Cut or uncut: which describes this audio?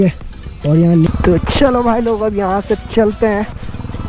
cut